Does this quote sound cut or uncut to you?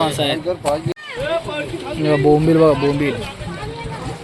cut